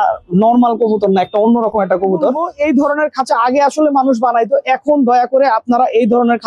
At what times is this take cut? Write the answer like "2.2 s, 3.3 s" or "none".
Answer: 2.5 s